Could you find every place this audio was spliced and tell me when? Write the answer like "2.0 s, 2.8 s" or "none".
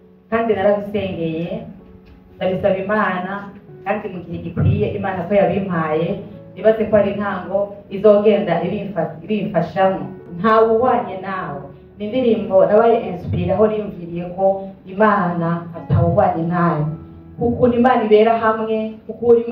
10.2 s